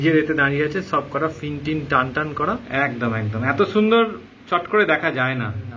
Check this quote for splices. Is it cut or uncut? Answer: cut